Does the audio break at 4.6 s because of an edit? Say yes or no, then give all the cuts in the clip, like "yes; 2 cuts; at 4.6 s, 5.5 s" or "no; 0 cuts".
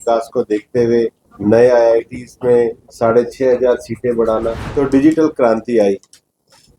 yes; 3 cuts; at 1.2 s, 2.8 s, 4.6 s